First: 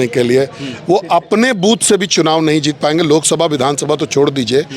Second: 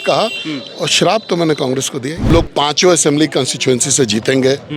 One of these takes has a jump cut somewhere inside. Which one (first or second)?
second